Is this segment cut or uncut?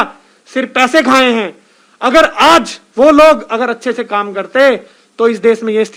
uncut